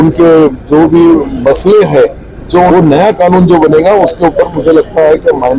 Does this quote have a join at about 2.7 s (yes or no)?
yes